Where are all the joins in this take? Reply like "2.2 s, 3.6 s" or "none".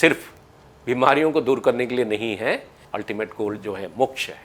2.7 s